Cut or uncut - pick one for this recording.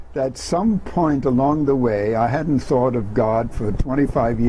uncut